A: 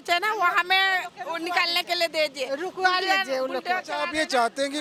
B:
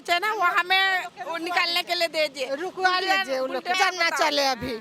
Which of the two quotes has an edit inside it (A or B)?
B